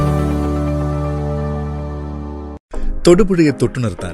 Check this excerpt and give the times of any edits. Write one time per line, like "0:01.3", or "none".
0:02.6